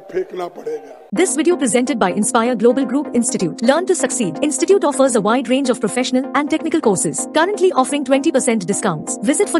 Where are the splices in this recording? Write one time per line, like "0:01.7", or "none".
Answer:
0:00.9